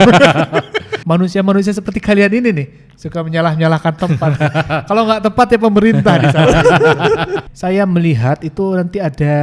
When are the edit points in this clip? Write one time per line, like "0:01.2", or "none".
0:00.9
0:07.5